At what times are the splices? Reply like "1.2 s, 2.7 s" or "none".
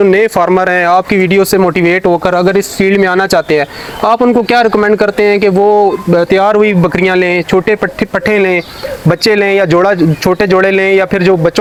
none